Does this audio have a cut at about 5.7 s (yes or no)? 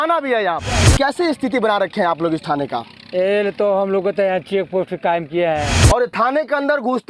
yes